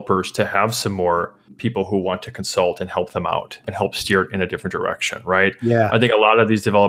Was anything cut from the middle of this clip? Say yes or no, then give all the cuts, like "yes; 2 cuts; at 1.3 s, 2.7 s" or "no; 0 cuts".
yes; 1 cut; at 3.6 s